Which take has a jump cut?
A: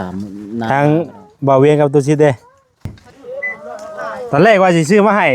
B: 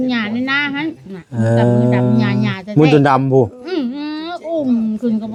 A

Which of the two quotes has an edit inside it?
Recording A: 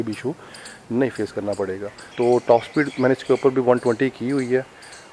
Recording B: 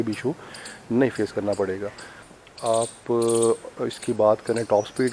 A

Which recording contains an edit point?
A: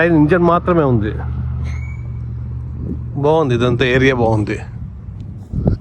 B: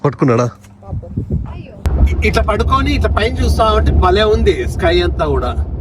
B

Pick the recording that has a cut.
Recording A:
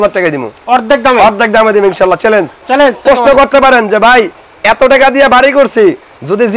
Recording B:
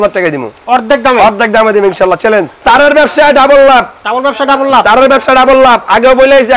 B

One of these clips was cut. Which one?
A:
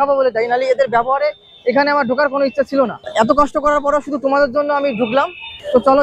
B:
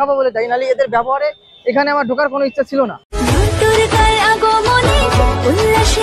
B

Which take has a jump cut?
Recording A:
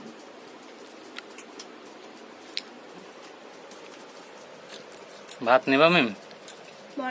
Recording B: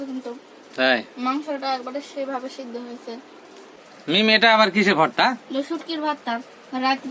B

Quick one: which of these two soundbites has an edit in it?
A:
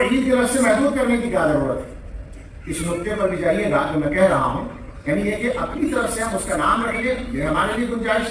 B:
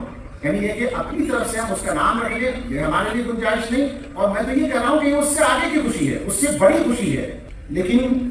B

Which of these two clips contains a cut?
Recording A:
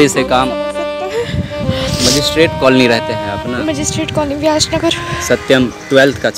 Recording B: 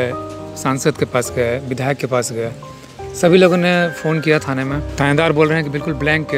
B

